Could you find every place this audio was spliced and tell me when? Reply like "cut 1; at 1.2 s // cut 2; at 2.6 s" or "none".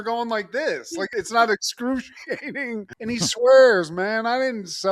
cut 1; at 2.9 s